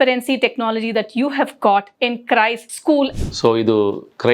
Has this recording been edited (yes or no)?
yes